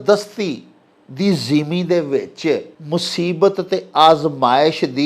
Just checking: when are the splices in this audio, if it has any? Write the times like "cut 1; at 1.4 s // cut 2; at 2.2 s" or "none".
cut 1; at 2.7 s